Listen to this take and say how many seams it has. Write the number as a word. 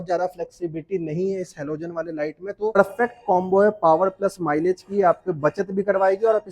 one